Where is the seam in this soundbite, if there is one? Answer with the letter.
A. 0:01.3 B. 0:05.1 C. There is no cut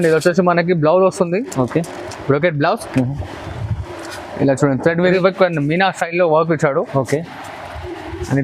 B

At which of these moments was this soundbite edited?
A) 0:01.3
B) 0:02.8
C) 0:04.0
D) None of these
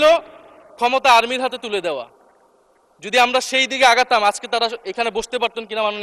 D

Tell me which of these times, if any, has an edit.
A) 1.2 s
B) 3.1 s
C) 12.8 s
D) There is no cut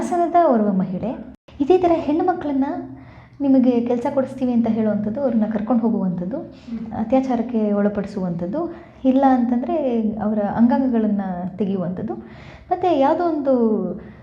A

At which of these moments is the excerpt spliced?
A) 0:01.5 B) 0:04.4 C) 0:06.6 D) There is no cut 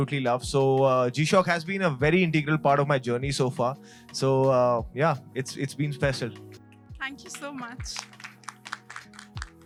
D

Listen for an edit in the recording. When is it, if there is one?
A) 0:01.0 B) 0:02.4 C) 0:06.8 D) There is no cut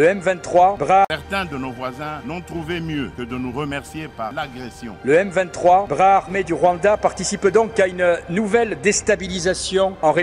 A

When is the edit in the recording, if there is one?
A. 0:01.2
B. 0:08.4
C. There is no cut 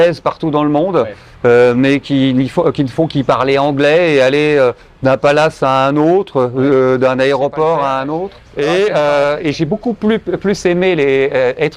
B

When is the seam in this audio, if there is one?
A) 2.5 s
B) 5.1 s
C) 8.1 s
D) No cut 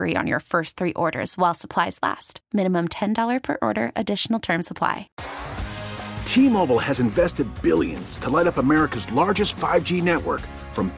B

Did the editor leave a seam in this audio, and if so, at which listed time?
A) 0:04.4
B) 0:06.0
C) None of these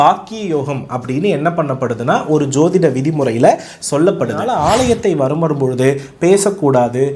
A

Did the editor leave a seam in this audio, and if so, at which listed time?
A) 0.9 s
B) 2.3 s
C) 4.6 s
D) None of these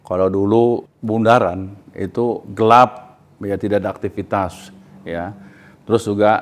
A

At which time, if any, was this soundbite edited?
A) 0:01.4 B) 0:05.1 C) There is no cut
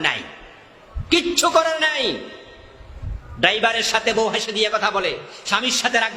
C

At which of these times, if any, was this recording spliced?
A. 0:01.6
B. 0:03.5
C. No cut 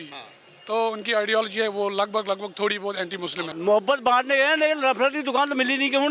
B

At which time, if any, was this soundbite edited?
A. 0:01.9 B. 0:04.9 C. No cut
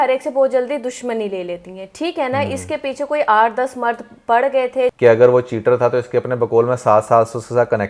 B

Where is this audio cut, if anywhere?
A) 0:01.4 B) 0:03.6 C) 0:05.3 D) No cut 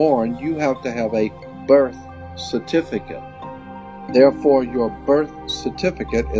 B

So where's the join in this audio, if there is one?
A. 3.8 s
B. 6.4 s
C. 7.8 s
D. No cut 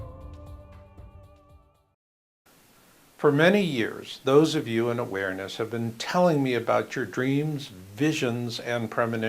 B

